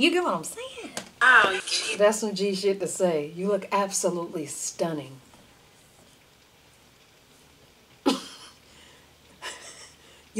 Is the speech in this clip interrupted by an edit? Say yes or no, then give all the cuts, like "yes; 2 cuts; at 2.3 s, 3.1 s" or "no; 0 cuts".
yes; 1 cut; at 1.6 s